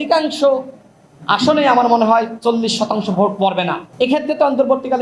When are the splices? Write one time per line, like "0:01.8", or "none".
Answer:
0:03.8